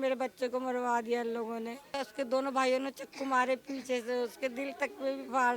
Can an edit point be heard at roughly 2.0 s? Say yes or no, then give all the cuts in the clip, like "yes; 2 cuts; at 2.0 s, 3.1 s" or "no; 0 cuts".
yes; 1 cut; at 2.0 s